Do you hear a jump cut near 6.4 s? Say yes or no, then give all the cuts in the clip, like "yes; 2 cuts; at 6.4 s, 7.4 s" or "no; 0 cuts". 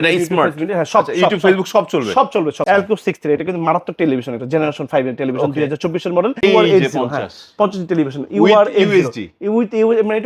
yes; 2 cuts; at 2.6 s, 6.4 s